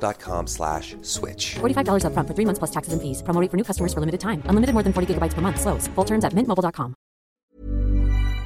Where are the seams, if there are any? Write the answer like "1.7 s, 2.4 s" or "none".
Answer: 7.5 s